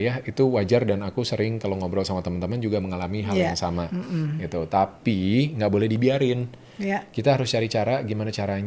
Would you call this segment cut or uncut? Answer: uncut